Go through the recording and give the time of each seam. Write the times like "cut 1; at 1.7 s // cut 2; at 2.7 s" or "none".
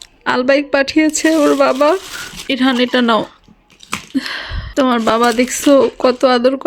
cut 1; at 2.4 s // cut 2; at 4.6 s